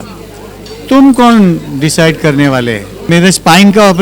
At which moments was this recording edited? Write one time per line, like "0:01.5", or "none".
0:03.1